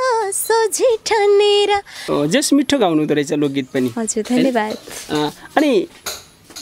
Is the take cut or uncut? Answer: cut